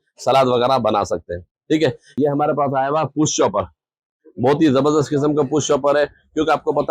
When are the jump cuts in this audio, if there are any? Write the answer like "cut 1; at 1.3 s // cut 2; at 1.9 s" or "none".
cut 1; at 2.0 s